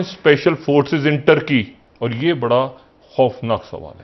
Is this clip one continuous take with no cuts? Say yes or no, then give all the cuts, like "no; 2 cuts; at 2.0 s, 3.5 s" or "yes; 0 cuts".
no; 1 cut; at 1.8 s